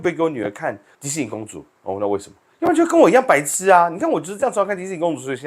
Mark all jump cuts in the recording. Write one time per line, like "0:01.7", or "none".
0:00.9